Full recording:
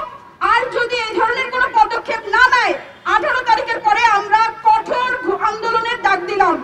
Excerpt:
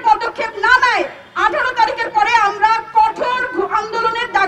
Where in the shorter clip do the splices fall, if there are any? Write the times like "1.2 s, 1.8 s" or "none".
none